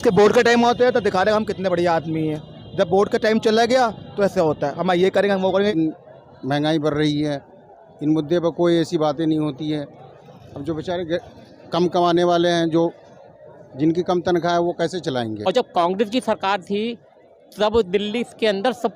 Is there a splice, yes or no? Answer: yes